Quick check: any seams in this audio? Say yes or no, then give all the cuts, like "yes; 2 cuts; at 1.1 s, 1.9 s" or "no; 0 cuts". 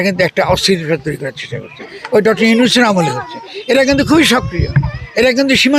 no; 0 cuts